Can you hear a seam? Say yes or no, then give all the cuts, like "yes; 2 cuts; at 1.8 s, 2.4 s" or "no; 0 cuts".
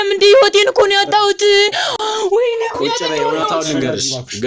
no; 0 cuts